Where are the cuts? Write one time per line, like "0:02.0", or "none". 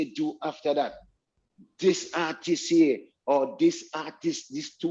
none